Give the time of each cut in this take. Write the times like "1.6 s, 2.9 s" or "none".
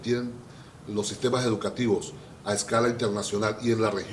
3.0 s